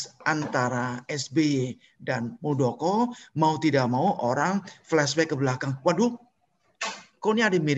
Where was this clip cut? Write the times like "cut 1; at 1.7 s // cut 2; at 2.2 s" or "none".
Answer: none